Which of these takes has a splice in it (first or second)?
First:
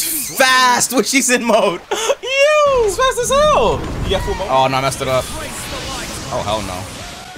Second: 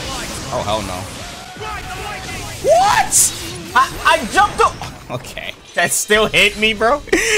first